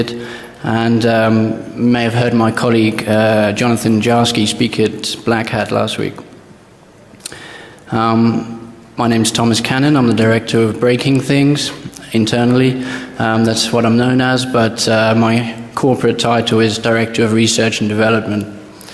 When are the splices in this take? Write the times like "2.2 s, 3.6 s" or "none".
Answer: none